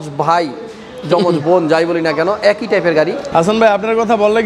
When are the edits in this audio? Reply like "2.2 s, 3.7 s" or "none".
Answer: 3.2 s